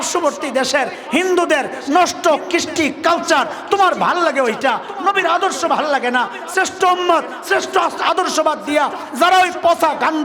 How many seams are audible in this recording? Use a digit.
0